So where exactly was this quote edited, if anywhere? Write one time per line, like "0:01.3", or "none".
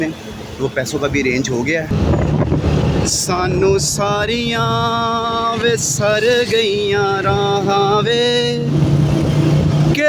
0:01.9